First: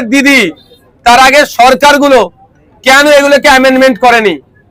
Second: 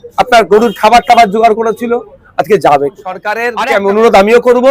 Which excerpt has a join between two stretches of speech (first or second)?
second